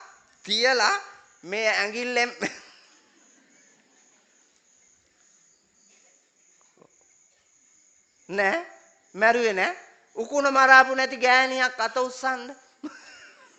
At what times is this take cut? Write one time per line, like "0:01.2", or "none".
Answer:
none